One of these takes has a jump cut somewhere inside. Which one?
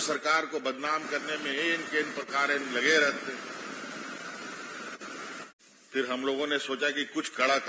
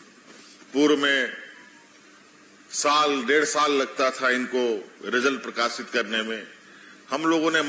first; 1 cut; at 5.5 s

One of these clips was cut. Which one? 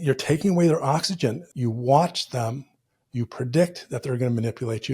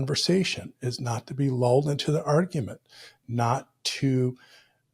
first; 1 cut; at 1.5 s

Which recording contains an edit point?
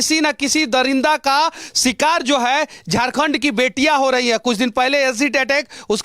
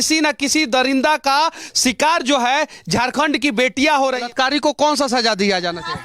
second; 1 cut; at 4.2 s

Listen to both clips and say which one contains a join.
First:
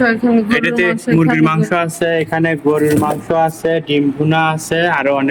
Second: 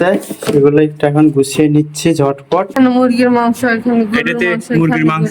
second; 1 cut; at 2.7 s

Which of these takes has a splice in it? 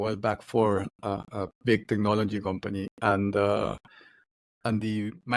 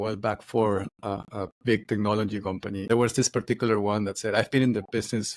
second; 1 cut; at 2.9 s

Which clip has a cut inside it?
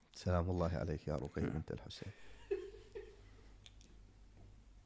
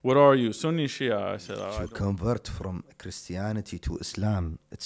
second; 1 cut; at 1.7 s

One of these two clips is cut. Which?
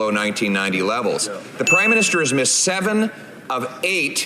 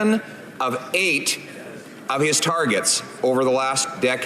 first; 1 cut; at 1.4 s

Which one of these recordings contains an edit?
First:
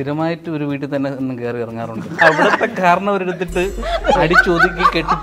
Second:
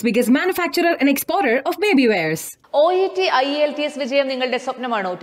first; 1 cut; at 2.2 s

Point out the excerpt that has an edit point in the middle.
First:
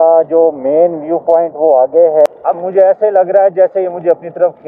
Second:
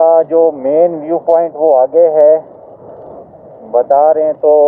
first; 1 cut; at 2.3 s

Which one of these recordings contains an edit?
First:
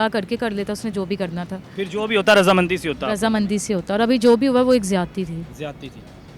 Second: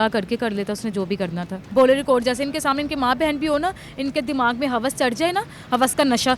second; 1 cut; at 1.5 s

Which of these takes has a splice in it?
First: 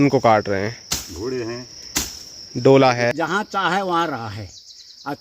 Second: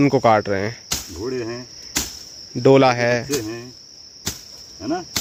first; 1 cut; at 3.1 s

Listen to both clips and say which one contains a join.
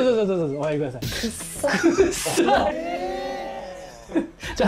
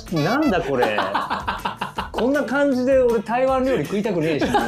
first; 1 cut; at 2.7 s

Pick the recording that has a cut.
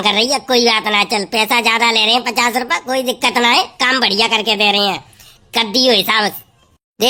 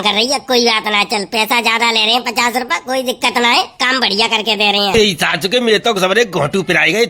second; 1 cut; at 4.9 s

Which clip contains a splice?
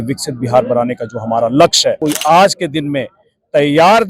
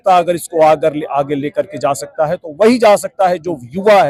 first; 1 cut; at 2.0 s

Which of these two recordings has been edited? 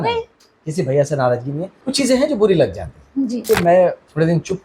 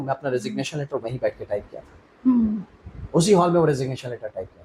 first; 2 cuts; at 1.8 s, 3.4 s

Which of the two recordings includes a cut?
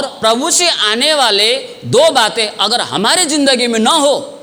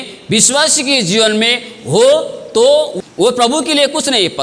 second; 1 cut; at 2.9 s

